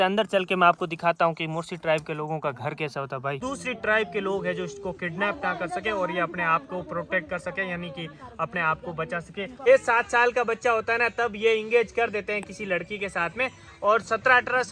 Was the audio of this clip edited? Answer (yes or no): yes